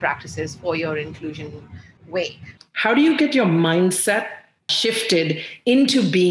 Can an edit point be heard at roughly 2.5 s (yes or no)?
yes